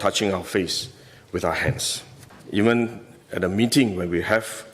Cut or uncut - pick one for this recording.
cut